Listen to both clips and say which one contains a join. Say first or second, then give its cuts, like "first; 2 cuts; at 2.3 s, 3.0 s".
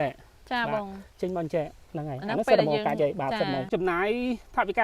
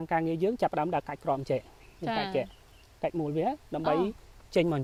first; 1 cut; at 3.7 s